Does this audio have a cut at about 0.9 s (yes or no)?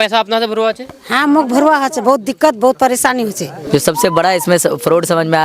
no